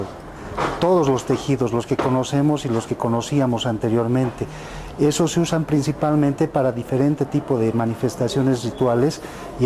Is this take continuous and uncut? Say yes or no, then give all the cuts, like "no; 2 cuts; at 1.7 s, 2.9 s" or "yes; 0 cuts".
no; 1 cut; at 3.3 s